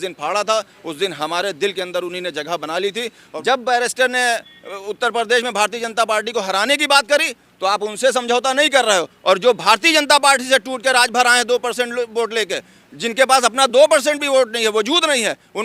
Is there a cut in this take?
yes; 1 cut; at 3.2 s

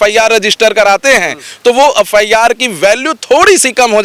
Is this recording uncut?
yes; 0 cuts

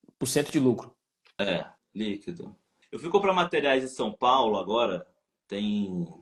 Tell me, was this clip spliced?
no; 0 cuts

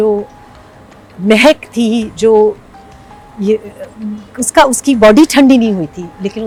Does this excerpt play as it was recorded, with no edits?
yes; 0 cuts

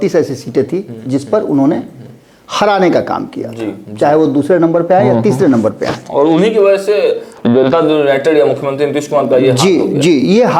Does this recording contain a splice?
no; 0 cuts

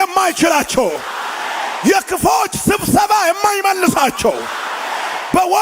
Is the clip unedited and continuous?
yes; 0 cuts

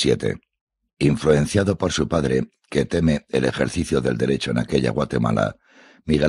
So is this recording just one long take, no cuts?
yes; 0 cuts

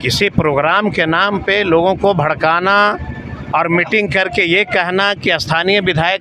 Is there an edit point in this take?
no; 0 cuts

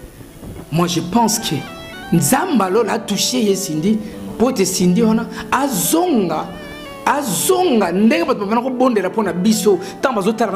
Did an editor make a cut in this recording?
no; 0 cuts

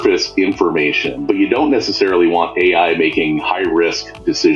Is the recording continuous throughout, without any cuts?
no; 1 cut; at 1.1 s

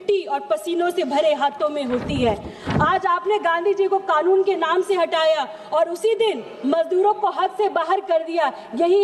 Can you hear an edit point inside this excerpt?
no; 0 cuts

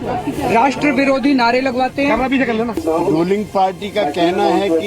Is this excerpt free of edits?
no; 1 cut; at 2.8 s

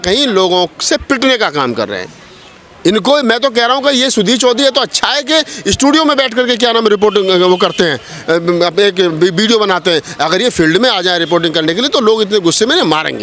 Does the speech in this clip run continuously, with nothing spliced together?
yes; 0 cuts

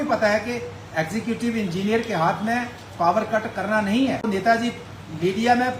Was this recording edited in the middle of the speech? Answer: yes; 1 cut; at 4.2 s

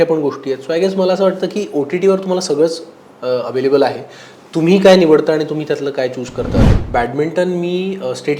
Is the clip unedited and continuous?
no; 1 cut; at 6.7 s

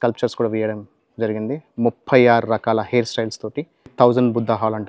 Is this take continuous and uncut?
no; 1 cut; at 3.8 s

